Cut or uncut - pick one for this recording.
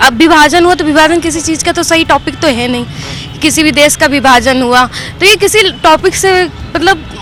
uncut